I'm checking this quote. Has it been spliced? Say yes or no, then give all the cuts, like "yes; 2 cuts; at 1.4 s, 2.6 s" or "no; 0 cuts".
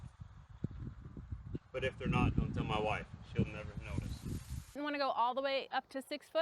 yes; 1 cut; at 4.8 s